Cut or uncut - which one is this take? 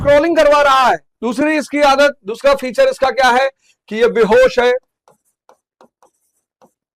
uncut